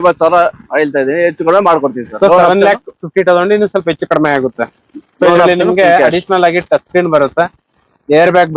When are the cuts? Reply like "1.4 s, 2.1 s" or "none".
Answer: none